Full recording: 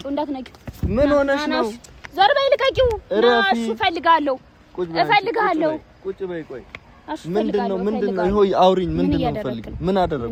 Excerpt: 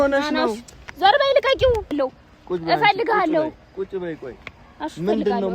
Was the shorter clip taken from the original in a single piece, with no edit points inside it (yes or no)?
no